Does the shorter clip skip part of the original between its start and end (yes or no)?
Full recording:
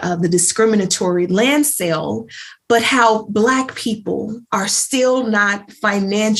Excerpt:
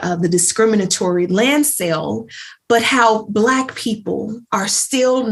no